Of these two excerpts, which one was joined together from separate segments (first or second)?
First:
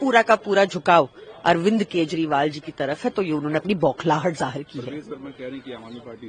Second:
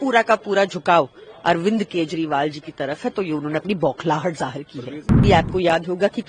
second